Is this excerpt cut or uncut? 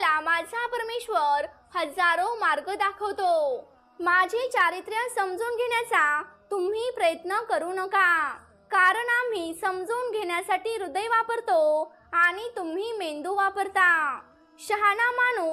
cut